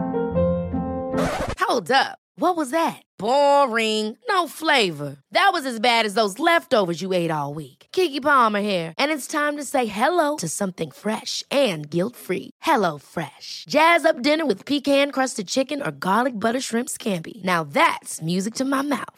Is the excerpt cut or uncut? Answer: uncut